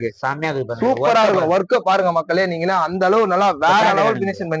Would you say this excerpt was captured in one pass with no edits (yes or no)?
yes